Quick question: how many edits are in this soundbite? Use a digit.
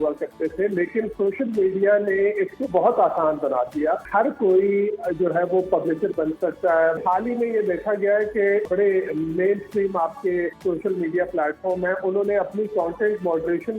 4